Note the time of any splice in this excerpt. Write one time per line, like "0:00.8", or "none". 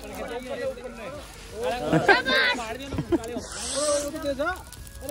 none